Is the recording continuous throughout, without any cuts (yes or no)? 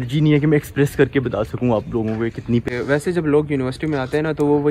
no